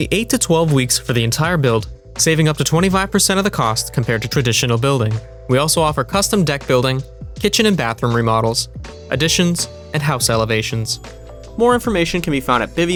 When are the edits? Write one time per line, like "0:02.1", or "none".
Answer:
none